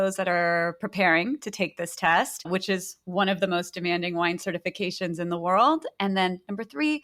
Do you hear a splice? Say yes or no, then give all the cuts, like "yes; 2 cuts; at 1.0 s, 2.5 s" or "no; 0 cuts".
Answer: no; 0 cuts